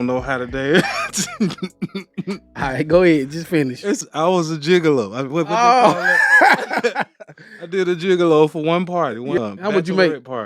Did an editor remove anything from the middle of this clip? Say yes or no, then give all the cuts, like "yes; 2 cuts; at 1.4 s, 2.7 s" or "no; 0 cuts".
yes; 2 cuts; at 4.0 s, 9.4 s